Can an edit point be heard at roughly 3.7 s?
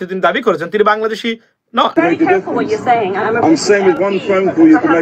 no; 1 cut; at 1.9 s

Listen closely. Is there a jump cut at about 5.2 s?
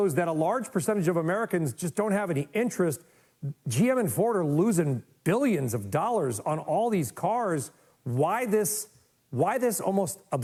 no; 0 cuts

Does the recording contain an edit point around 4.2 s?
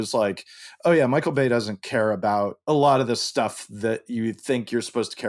no; 1 cut; at 2.6 s

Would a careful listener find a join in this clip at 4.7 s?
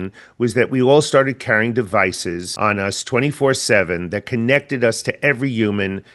no; 1 cut; at 2.5 s

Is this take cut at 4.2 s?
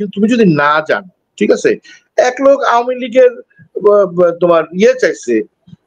no; 0 cuts

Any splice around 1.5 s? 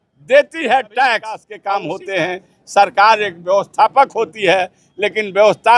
yes; 1 cut; at 1.5 s

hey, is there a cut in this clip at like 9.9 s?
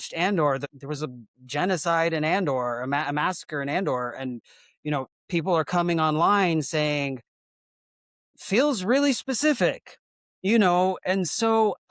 no; 0 cuts

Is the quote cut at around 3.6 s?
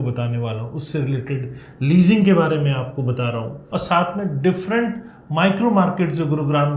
yes; 1 cut; at 3.6 s

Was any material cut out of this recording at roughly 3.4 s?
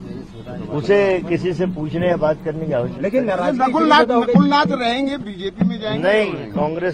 no; 0 cuts

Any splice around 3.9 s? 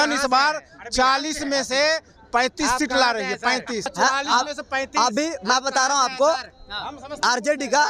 yes; 1 cut; at 3.9 s

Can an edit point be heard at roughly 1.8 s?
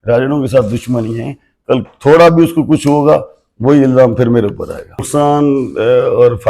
no; 1 cut; at 5.0 s

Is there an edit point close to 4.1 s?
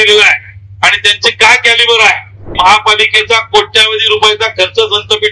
no; 1 cut; at 2.4 s

